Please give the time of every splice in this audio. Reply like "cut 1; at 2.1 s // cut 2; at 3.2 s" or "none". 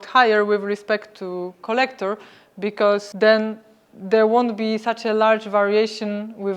cut 1; at 3.1 s